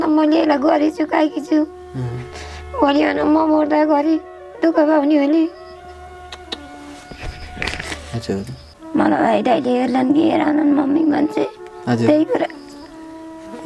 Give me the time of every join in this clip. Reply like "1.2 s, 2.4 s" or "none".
8.7 s

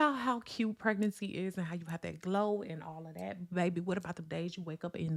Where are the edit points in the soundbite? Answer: none

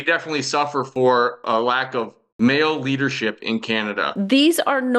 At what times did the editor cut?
2.2 s, 4.1 s

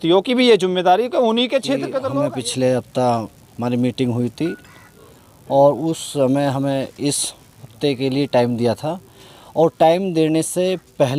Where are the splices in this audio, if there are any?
2.0 s

